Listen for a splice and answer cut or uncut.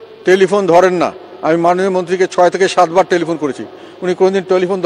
uncut